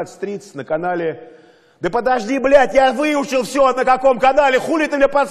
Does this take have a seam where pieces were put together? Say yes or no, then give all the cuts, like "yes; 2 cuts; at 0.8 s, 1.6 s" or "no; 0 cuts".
no; 0 cuts